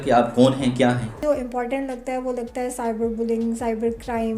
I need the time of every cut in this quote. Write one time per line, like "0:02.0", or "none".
0:01.1